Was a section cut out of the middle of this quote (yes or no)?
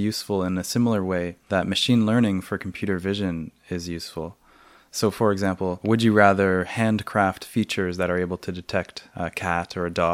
yes